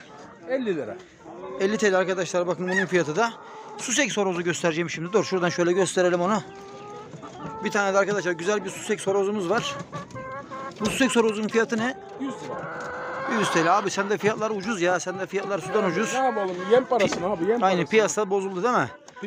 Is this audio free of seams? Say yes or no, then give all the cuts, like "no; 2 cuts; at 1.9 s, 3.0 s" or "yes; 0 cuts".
yes; 0 cuts